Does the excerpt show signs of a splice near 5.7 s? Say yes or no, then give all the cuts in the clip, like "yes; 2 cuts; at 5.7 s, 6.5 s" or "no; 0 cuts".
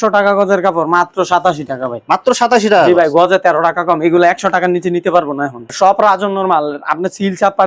yes; 1 cut; at 5.7 s